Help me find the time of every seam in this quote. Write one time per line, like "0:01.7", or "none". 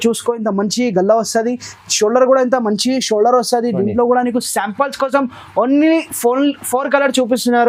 none